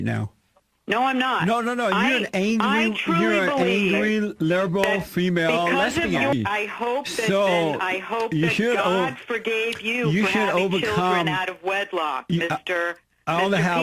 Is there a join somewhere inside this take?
yes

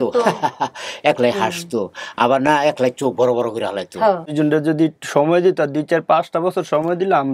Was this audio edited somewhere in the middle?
yes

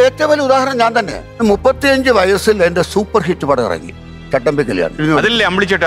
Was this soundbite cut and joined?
yes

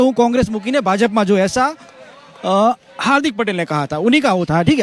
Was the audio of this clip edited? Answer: no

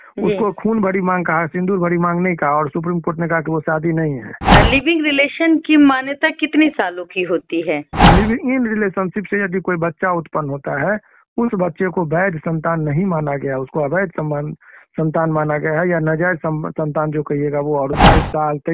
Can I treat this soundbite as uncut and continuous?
no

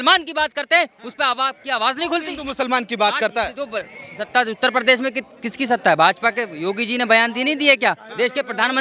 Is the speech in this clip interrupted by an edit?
no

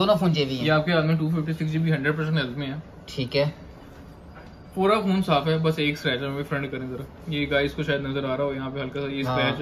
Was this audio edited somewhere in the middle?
no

